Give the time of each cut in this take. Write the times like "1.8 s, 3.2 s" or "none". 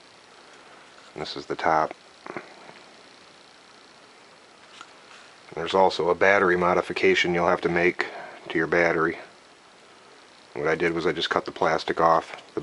1.9 s